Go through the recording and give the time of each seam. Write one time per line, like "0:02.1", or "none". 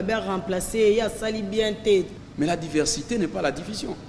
0:02.1